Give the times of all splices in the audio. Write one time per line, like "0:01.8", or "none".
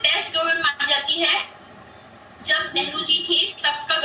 none